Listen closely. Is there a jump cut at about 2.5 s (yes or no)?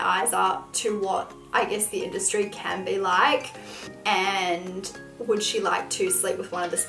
no